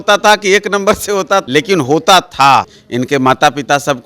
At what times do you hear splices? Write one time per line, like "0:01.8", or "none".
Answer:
0:01.4
0:02.8